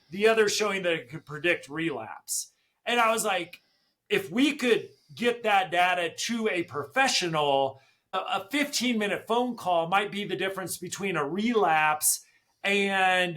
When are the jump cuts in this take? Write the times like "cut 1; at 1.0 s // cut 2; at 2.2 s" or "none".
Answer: cut 1; at 8.2 s